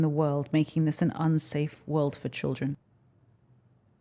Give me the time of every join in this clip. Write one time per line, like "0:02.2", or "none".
0:02.8